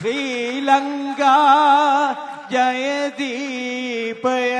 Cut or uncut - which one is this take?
uncut